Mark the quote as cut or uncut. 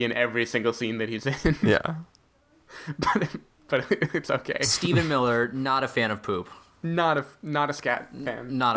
uncut